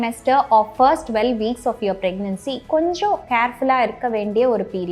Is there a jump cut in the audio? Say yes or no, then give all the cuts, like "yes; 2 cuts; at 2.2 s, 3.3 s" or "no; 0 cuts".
no; 0 cuts